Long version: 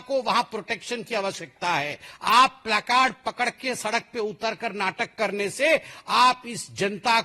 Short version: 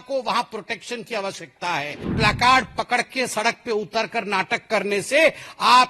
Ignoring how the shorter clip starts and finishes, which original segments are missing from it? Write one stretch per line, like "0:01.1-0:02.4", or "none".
0:02.1-0:02.6